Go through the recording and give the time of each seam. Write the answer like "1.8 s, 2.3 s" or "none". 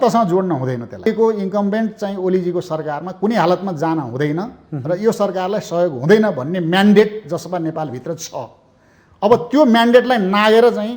1.1 s